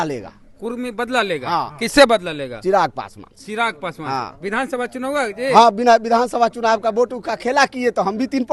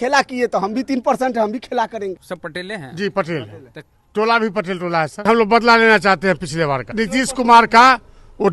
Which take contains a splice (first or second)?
second